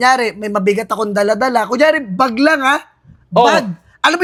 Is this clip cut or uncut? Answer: uncut